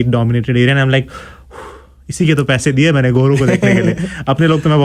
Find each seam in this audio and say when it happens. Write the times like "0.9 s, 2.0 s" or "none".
none